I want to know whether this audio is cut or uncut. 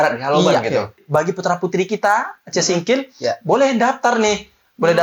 cut